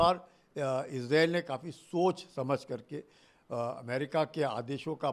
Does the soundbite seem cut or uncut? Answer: uncut